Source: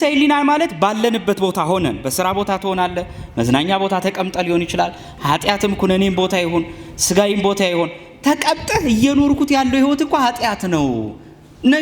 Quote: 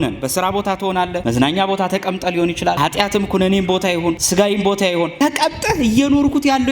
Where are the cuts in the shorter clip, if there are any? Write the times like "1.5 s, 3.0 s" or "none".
1.2 s, 2.8 s, 4.2 s, 5.1 s